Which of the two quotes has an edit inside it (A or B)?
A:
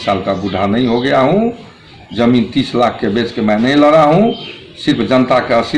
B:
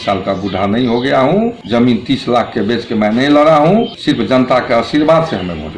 B